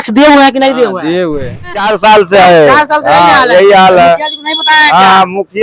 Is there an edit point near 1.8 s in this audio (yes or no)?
yes